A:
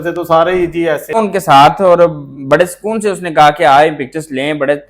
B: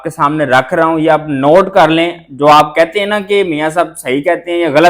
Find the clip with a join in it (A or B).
A